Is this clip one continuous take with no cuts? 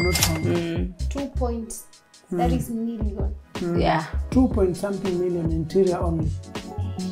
yes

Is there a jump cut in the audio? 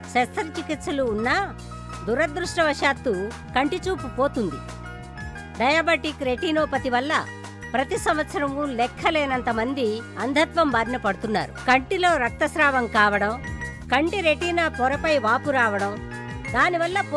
no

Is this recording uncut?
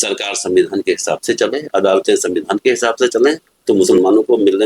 no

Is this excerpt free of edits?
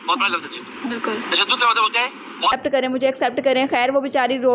no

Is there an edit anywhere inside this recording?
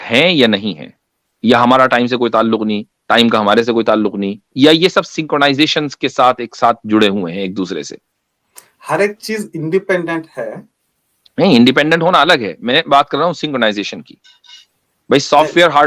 no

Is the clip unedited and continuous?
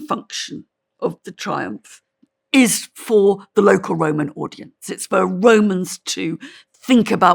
yes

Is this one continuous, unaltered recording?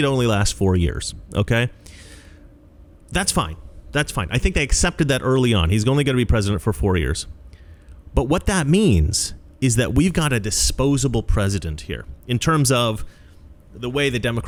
yes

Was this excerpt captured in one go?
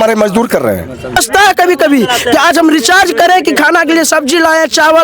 no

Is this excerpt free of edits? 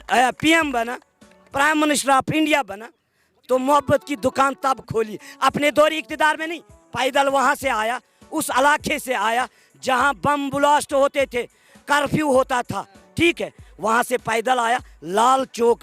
yes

